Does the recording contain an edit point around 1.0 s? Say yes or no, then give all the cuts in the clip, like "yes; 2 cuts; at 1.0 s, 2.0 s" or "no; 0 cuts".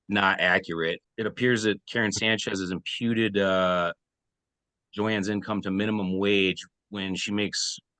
yes; 1 cut; at 1.0 s